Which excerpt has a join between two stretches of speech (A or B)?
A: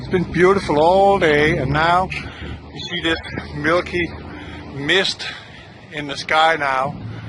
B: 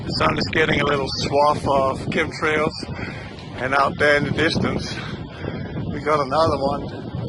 B